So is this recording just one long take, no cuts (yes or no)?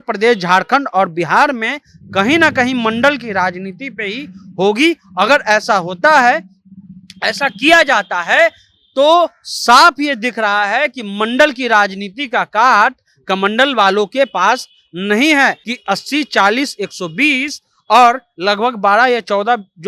no